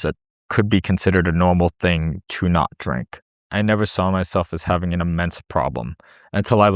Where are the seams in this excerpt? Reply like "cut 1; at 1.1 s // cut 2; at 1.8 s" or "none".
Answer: cut 1; at 3.4 s